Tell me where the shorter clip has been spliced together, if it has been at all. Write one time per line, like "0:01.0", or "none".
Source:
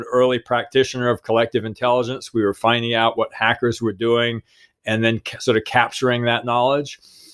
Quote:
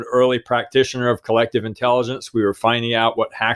none